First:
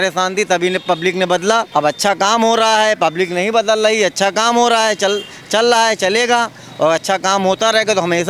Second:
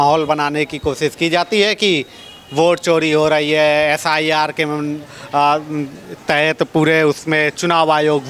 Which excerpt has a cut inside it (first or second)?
first